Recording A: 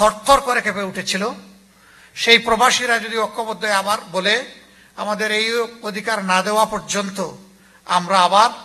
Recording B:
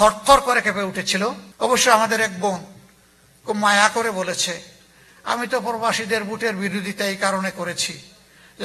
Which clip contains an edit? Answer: B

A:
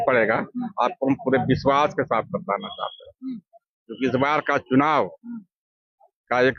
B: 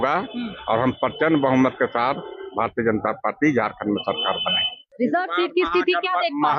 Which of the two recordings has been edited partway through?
B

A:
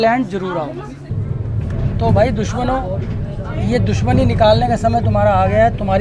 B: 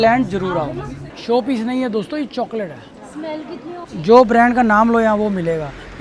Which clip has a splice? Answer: B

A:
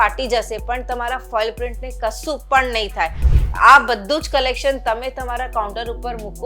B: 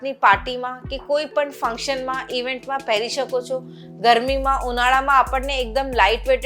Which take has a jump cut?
A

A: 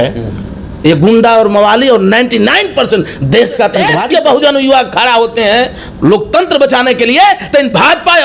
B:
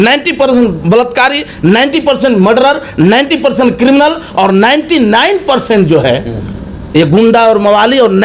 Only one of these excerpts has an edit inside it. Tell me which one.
A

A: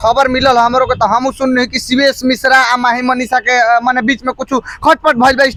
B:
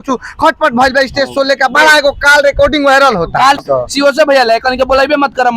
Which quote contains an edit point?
B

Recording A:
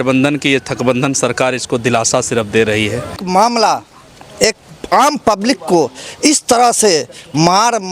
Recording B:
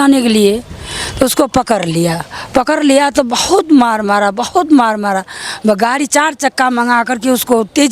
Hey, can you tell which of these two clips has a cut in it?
A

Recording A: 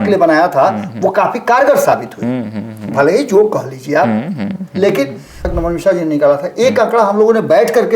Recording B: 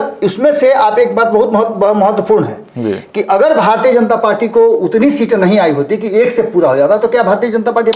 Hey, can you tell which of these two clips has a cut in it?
A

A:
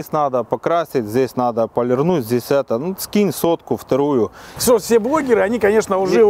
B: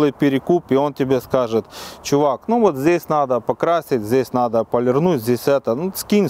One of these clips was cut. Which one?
A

